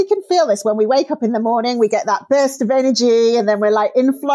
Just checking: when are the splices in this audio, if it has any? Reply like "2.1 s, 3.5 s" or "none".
none